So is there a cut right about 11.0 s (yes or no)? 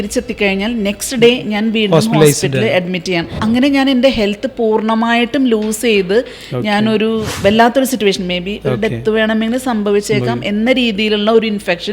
no